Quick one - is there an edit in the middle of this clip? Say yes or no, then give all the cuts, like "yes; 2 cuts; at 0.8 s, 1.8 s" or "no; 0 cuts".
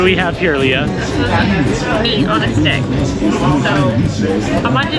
no; 0 cuts